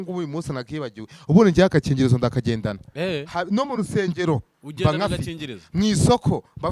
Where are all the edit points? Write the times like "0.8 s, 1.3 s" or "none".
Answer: none